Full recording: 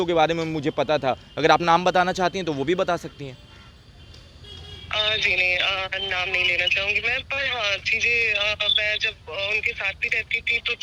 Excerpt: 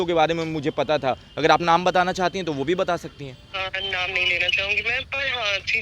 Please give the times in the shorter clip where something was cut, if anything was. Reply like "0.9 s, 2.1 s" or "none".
3.5 s